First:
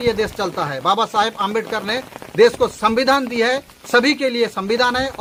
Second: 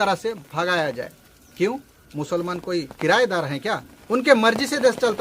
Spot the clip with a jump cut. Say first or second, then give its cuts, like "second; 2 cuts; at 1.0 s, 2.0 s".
second; 1 cut; at 3.9 s